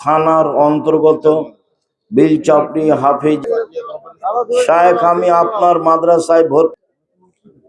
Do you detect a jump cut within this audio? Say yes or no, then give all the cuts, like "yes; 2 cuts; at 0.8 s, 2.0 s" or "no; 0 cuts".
yes; 2 cuts; at 3.5 s, 6.7 s